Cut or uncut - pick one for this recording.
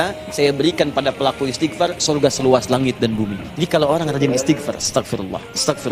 cut